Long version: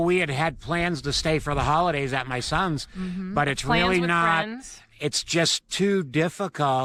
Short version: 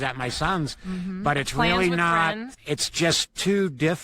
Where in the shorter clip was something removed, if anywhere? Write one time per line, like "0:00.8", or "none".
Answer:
0:02.5